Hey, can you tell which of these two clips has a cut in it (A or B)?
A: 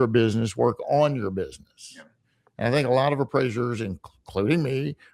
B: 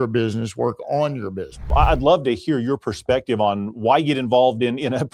B